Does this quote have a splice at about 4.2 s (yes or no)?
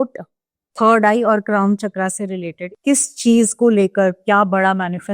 no